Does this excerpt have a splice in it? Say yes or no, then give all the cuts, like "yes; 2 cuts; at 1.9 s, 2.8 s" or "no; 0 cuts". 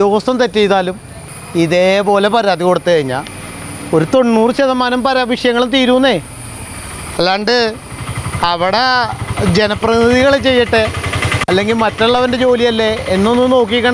no; 0 cuts